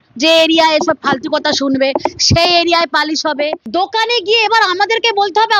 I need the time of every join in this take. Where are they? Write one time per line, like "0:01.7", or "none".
0:03.6